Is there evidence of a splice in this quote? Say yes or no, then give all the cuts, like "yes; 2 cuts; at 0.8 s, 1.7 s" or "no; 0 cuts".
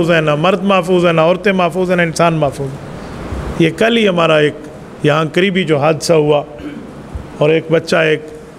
no; 0 cuts